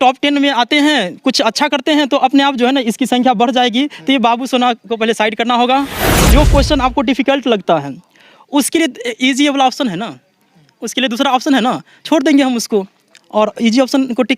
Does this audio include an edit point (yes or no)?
yes